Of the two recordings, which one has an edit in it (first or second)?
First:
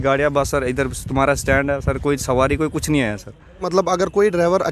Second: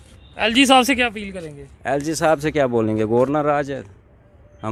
first